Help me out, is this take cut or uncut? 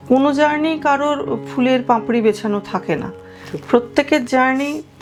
uncut